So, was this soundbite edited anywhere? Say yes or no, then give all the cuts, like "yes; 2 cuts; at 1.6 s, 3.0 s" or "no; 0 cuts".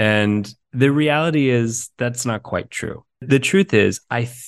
yes; 1 cut; at 3.1 s